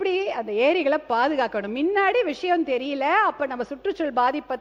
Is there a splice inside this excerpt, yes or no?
no